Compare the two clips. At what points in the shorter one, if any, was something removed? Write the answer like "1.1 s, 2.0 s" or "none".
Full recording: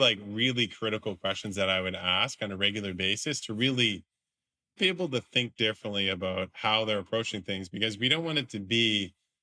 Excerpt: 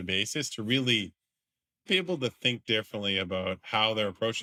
none